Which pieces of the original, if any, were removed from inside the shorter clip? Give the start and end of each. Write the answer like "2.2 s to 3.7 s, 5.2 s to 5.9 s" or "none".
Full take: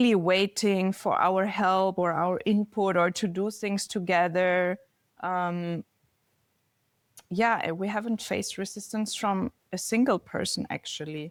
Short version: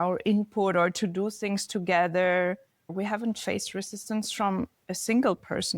5.1 s to 7.8 s